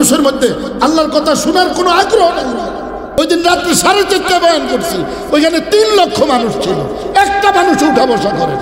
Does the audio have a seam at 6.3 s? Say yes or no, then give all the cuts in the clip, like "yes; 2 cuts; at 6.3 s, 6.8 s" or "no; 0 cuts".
no; 1 cut; at 3.2 s